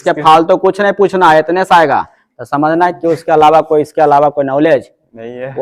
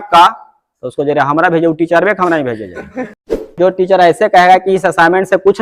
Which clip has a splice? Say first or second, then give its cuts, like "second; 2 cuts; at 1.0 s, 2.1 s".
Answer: second; 1 cut; at 3.5 s